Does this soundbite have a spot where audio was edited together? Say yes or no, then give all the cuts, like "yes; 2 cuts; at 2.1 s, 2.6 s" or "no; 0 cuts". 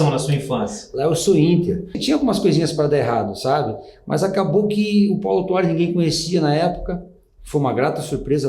yes; 1 cut; at 2.0 s